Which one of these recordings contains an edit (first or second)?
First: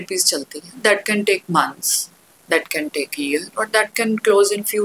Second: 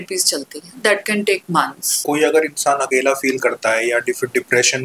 second